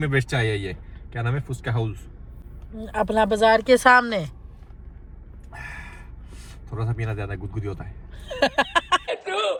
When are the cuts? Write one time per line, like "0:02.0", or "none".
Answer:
none

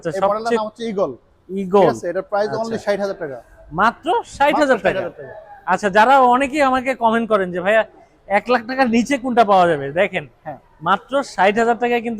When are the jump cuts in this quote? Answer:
none

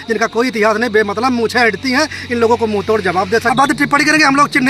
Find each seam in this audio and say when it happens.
0:03.5

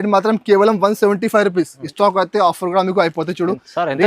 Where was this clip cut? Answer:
0:01.8

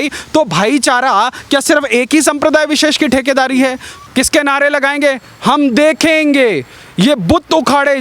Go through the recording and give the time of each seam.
0:03.9

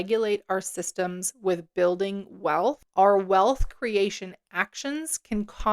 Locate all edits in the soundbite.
0:02.8

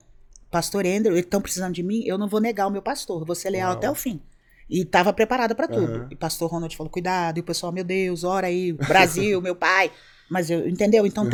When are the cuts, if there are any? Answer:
none

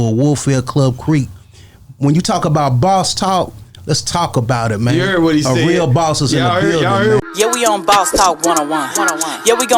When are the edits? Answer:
0:07.2

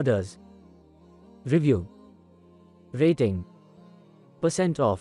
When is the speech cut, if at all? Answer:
none

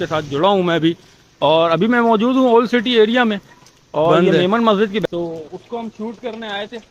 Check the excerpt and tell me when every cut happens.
0:05.0

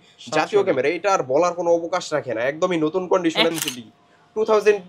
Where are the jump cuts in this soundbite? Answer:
0:03.5

